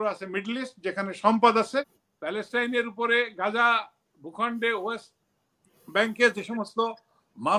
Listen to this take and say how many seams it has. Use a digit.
1